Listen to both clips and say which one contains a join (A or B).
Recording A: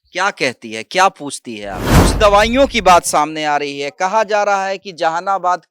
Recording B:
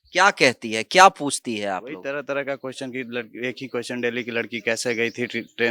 A